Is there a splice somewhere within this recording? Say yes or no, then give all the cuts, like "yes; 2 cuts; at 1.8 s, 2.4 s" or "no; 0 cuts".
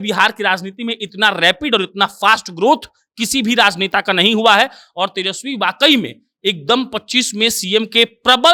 no; 0 cuts